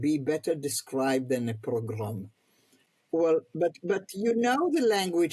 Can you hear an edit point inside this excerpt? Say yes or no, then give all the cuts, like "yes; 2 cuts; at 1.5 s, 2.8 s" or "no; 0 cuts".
yes; 1 cut; at 3.1 s